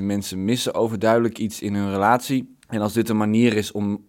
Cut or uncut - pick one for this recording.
cut